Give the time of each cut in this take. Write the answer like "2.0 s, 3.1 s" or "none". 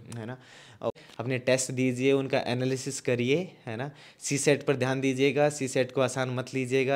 0.9 s